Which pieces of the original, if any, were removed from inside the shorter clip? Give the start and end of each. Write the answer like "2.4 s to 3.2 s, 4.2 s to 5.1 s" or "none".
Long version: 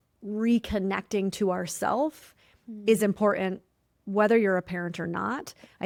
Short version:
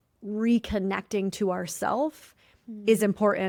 none